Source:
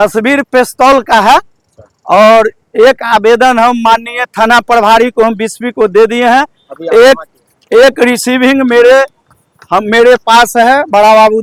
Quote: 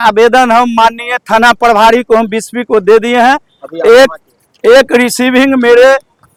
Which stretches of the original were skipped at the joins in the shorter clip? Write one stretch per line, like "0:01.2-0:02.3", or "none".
none